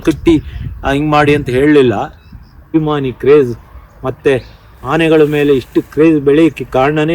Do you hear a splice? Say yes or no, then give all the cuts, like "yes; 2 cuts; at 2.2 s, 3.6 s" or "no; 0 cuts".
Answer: yes; 1 cut; at 2.7 s